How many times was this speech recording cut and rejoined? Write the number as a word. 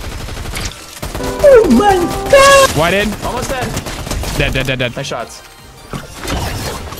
one